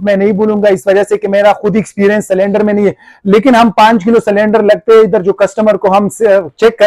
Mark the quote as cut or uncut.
uncut